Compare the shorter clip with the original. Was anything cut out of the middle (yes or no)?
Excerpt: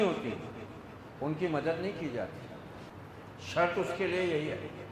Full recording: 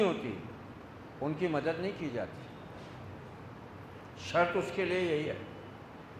yes